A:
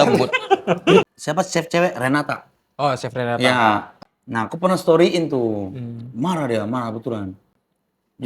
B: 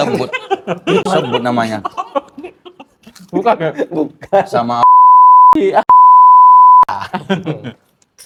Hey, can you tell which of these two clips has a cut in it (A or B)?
A